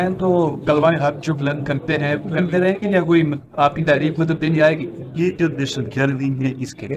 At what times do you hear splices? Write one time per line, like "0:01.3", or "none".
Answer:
none